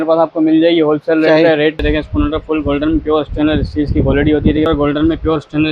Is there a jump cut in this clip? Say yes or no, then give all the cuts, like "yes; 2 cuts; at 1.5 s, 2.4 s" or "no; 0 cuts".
yes; 2 cuts; at 1.8 s, 4.7 s